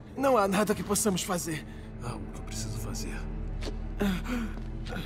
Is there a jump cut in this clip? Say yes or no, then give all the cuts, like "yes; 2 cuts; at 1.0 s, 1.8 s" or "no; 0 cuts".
yes; 1 cut; at 1.4 s